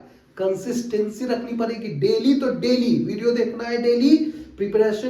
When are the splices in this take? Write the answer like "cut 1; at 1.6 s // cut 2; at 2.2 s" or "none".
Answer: none